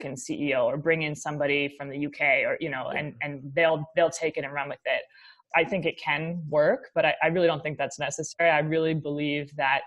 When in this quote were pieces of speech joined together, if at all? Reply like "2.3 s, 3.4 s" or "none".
5.4 s